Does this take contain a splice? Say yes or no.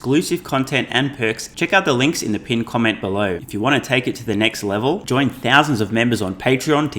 yes